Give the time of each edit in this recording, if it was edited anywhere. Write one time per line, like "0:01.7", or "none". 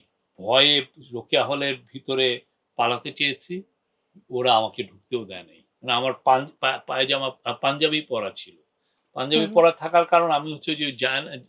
none